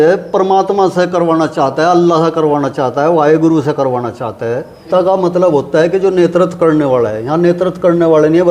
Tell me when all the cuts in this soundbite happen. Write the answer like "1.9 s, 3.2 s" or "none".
4.9 s